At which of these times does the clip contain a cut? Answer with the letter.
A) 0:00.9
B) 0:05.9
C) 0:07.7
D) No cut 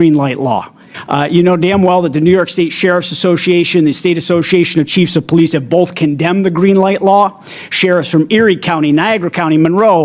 A